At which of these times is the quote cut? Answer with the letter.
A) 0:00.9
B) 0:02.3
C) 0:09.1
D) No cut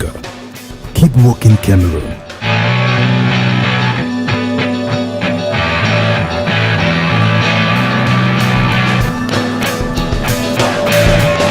B